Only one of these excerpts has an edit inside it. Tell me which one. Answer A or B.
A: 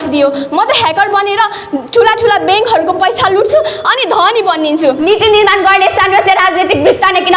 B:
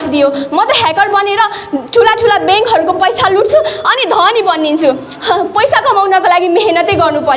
A